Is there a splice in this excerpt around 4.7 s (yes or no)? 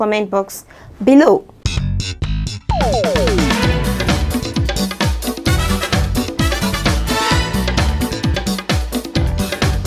no